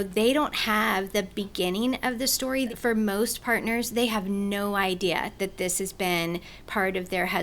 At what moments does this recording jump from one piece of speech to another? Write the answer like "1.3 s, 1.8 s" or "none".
2.7 s